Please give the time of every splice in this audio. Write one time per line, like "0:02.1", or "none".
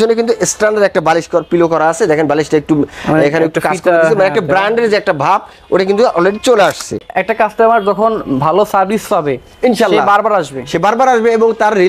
0:07.0